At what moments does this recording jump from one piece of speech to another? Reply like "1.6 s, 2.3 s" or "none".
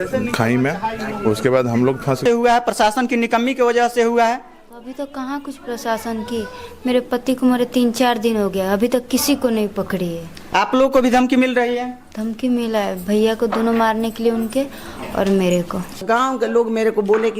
2.2 s, 16.0 s